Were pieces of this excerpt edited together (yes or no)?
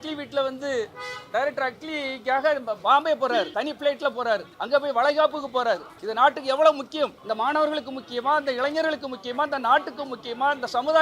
yes